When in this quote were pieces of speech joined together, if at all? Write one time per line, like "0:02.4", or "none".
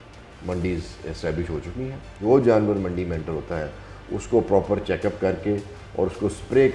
0:02.2

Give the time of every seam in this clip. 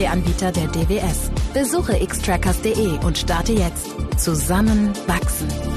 none

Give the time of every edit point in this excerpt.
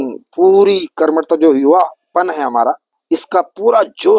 0:02.9

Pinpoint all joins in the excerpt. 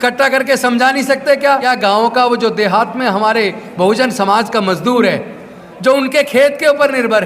0:01.6

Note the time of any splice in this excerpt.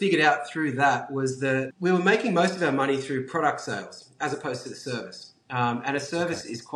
0:01.7

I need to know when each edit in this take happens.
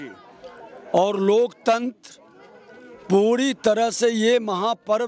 none

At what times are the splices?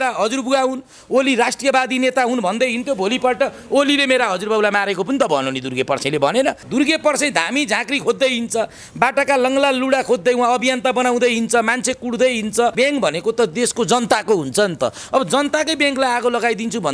0:06.6
0:12.7

